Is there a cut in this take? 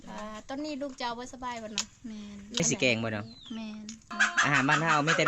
yes; 2 cuts; at 2.6 s, 4.1 s

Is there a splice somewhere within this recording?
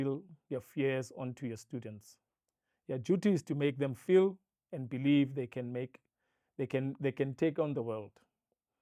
no; 0 cuts

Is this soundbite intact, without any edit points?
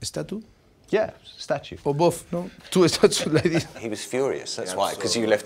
no; 2 cuts; at 1.7 s, 3.7 s

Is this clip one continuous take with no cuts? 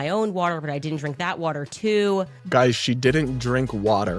no; 1 cut; at 2.4 s

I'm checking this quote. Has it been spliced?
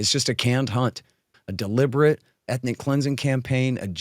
yes; 1 cut; at 1.2 s

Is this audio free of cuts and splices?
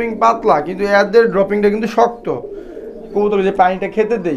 no; 1 cut; at 3.1 s

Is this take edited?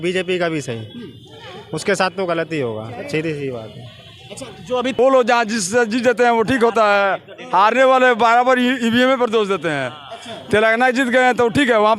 yes; 1 cut; at 5.0 s

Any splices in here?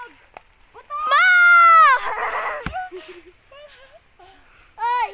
no; 0 cuts

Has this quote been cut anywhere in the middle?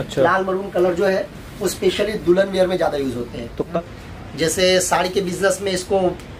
yes; 1 cut; at 3.7 s

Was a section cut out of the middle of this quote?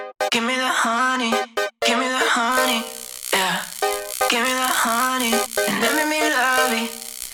no; 0 cuts

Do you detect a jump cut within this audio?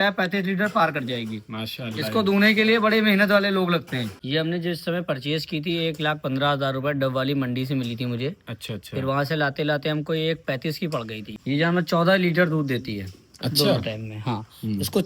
yes; 2 cuts; at 4.2 s, 11.4 s

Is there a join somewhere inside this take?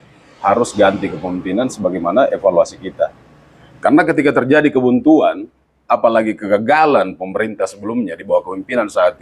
no; 0 cuts

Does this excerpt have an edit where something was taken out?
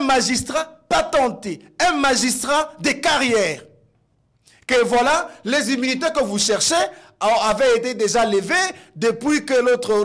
no; 0 cuts

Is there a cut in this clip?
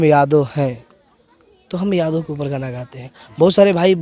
no; 0 cuts

